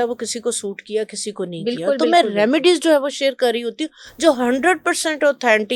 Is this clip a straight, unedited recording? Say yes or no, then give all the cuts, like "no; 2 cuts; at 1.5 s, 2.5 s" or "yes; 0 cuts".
yes; 0 cuts